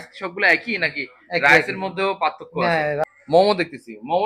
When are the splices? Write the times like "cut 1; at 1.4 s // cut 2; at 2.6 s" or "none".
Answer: cut 1; at 3.0 s